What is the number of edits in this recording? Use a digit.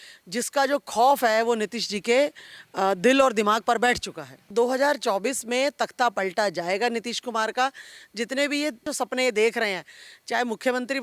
2